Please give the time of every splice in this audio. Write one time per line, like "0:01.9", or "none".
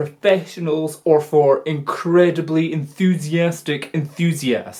none

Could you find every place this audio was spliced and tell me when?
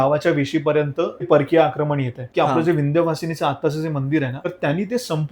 0:01.3
0:02.3
0:04.4

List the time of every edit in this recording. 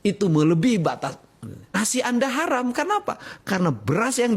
0:01.8

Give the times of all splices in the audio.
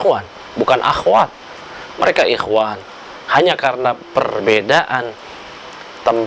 none

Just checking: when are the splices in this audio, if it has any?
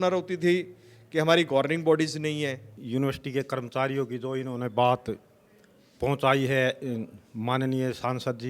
0:02.7

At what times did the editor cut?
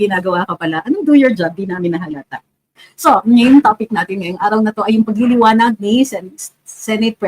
0:02.8

